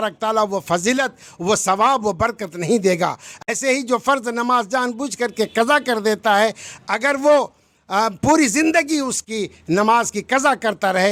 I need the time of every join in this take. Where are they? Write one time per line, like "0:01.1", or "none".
none